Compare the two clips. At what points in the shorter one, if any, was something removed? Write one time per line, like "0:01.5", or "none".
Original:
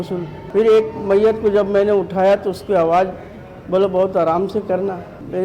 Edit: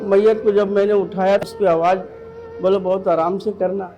0:01.5